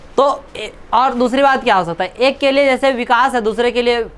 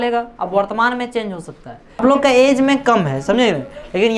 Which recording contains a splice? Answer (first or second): second